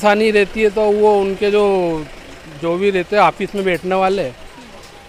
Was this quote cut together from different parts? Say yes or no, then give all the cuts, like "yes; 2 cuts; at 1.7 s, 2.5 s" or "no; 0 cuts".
no; 0 cuts